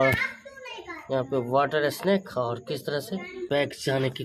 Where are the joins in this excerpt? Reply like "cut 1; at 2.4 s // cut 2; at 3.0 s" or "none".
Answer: cut 1; at 3.4 s